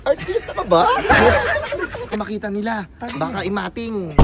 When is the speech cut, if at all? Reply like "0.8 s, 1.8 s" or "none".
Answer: 2.1 s